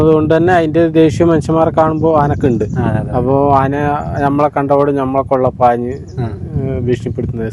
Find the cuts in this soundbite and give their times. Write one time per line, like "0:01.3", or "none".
none